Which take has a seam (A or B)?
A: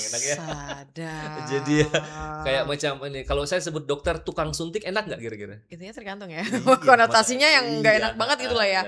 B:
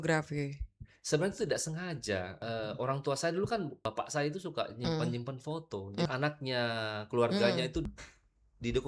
B